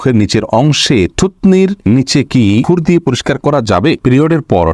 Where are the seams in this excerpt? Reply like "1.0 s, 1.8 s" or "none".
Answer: 1.8 s, 2.7 s, 4.0 s